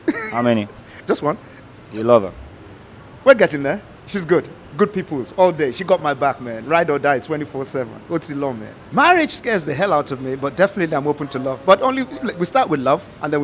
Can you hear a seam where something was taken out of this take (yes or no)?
yes